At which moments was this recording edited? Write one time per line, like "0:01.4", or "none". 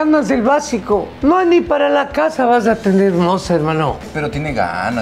0:01.1
0:04.1